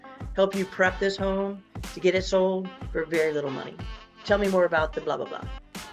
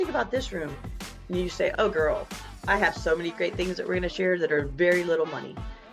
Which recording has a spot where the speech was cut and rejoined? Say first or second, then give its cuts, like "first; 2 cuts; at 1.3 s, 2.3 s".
second; 1 cut; at 1.7 s